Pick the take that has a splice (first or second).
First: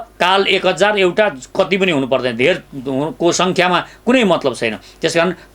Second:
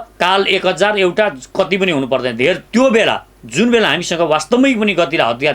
second